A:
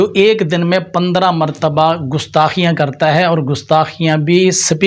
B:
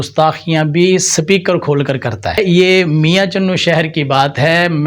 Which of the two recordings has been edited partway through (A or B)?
B